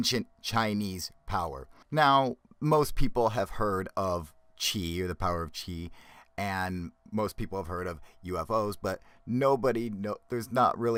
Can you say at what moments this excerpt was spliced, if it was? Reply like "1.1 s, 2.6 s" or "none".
none